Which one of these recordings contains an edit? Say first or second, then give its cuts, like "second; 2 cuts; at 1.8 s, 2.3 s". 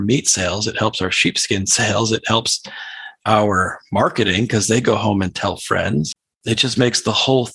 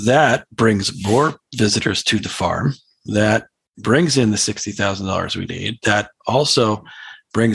first; 1 cut; at 6.3 s